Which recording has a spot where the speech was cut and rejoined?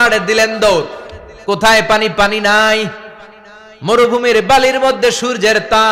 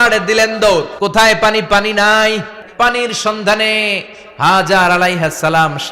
second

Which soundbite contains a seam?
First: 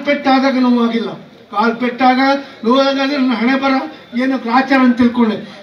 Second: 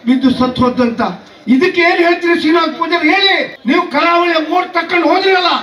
second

